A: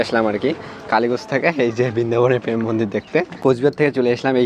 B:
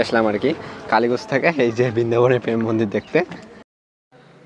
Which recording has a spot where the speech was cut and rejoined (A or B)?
A